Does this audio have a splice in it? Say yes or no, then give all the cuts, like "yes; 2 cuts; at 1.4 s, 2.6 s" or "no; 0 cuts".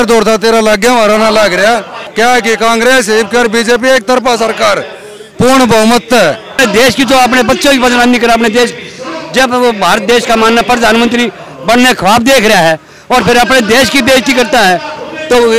yes; 2 cuts; at 2.0 s, 6.6 s